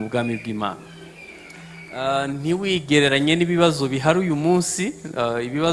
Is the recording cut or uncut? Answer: uncut